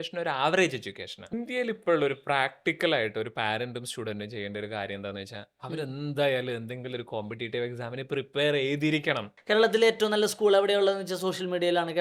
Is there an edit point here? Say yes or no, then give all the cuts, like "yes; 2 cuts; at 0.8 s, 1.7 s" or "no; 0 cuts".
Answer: yes; 2 cuts; at 1.3 s, 9.3 s